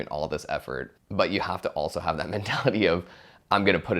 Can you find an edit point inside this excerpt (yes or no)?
yes